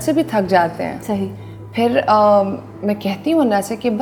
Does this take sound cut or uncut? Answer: uncut